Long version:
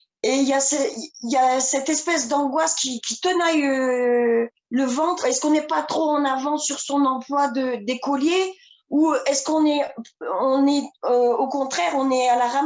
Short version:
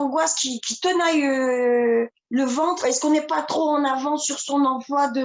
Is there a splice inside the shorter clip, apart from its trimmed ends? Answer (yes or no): no